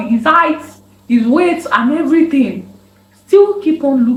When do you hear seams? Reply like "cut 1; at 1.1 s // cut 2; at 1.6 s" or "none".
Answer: none